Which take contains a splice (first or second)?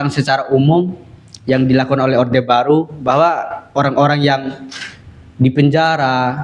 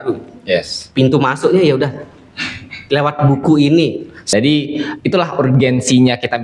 second